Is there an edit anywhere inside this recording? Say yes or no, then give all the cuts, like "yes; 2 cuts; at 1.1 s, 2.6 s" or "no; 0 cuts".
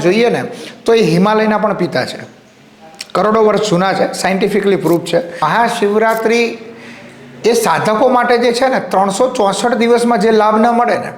yes; 1 cut; at 5.4 s